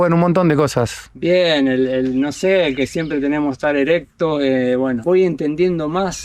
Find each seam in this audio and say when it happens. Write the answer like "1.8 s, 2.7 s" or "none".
5.0 s